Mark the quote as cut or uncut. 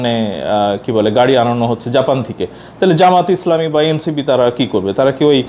uncut